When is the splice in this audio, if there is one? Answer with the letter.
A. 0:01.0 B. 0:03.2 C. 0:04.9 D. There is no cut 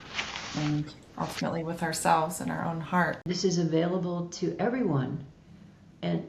B